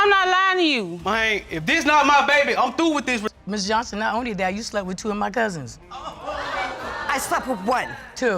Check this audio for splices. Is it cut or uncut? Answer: cut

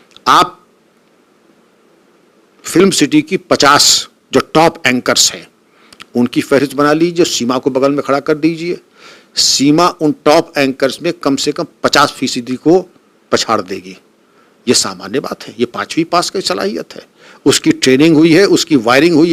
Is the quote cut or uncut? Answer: uncut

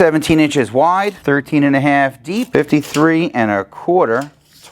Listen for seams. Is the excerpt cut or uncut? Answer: cut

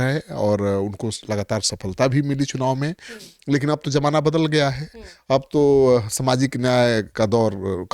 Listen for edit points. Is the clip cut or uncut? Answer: uncut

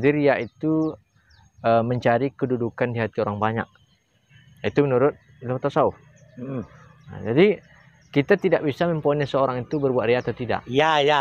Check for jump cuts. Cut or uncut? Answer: uncut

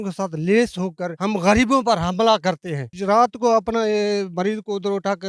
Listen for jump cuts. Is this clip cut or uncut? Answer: cut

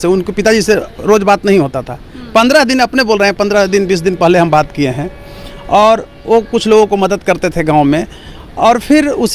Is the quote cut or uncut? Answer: uncut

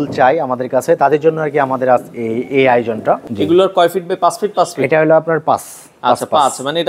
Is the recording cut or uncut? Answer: cut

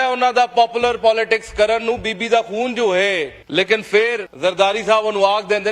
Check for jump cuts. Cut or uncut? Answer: cut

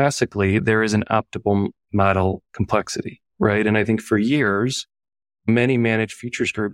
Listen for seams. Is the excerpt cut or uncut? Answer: uncut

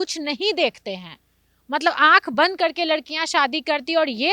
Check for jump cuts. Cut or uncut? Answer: uncut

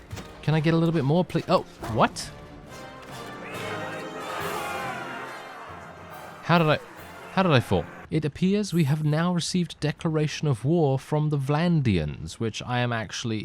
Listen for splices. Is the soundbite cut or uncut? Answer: cut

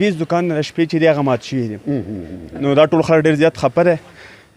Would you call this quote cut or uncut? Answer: uncut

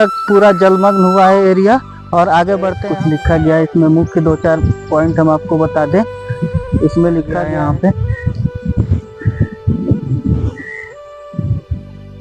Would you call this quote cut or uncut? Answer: cut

